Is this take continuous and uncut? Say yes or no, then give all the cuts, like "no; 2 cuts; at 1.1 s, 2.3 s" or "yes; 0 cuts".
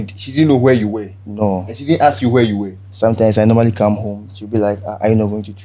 yes; 0 cuts